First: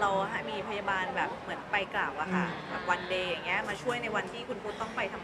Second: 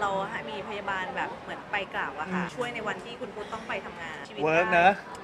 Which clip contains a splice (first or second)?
second